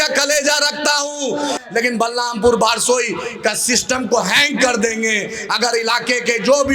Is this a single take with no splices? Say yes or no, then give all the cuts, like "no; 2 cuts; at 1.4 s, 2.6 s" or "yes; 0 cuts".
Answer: no; 1 cut; at 1.6 s